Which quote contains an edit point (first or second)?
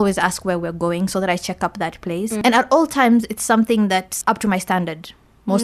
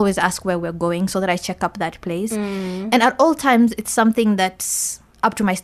first